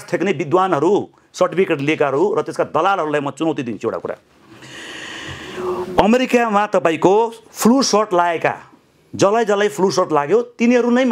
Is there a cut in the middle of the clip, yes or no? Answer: no